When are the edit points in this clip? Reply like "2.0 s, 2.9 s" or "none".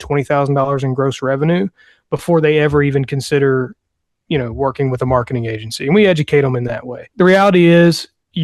7.0 s